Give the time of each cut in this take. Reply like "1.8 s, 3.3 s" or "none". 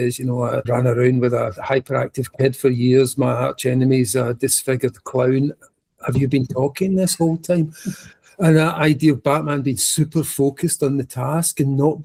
none

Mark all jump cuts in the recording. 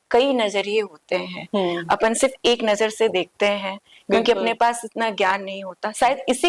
none

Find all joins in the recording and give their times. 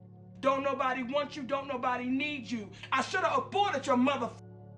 2.7 s

